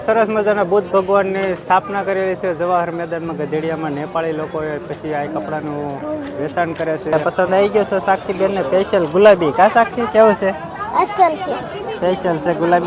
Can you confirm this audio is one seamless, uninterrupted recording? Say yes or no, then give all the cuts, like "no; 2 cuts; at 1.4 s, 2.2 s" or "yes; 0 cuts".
no; 1 cut; at 7.1 s